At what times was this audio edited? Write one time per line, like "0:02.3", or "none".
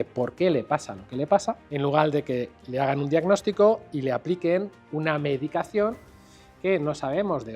0:01.7